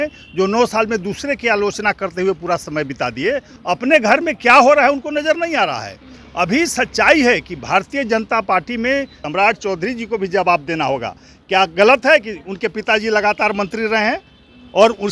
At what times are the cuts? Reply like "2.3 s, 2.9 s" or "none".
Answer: 3.5 s, 9.2 s